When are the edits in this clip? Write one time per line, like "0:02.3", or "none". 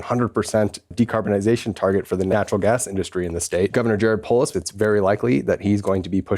0:00.9
0:02.3
0:03.7
0:04.5